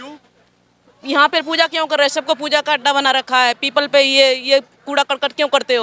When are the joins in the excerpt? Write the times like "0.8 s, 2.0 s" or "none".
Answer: none